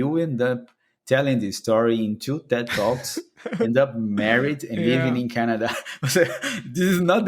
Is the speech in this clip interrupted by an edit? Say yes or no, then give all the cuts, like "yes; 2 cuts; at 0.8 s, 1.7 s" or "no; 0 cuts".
no; 0 cuts